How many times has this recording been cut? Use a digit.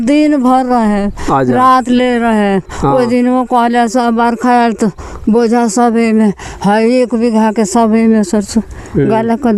0